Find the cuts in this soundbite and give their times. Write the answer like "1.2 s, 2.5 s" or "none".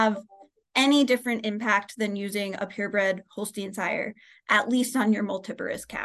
none